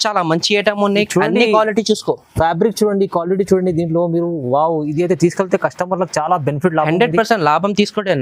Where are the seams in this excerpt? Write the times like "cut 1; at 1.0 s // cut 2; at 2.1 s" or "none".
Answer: none